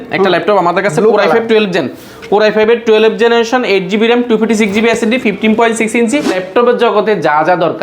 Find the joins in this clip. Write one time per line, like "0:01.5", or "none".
0:06.4

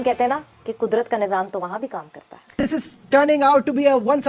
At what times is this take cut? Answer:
0:02.6

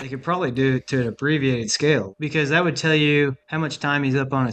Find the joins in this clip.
0:02.1
0:03.4

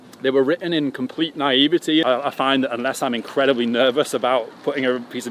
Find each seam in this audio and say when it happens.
0:02.0

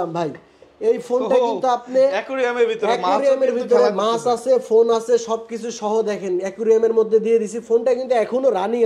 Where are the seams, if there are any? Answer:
none

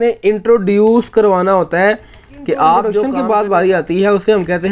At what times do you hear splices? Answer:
0:03.1

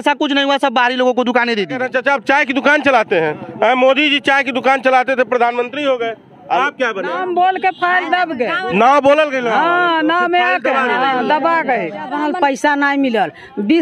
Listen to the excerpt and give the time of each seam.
0:01.8
0:07.1
0:12.1

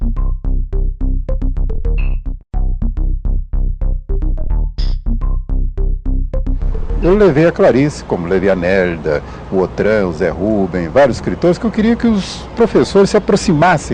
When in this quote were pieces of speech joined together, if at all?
none

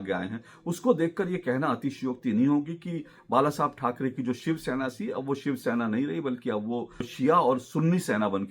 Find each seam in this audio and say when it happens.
0:07.1

